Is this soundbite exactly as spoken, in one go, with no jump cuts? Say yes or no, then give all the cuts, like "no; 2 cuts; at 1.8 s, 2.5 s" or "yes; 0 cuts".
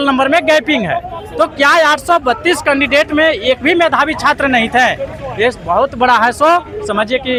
yes; 0 cuts